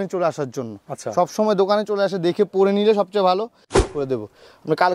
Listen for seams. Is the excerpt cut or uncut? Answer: cut